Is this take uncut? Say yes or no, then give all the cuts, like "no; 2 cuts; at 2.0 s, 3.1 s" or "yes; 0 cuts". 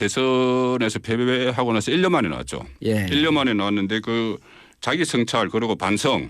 no; 1 cut; at 1.9 s